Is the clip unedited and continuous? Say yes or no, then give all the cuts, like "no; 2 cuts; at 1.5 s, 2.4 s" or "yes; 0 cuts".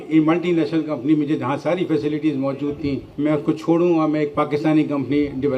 yes; 0 cuts